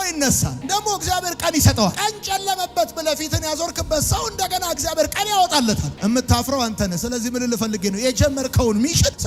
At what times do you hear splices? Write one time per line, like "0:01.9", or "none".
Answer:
none